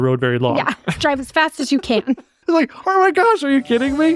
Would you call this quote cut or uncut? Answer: cut